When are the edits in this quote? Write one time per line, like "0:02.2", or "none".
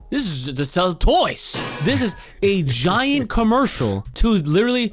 0:01.6
0:04.1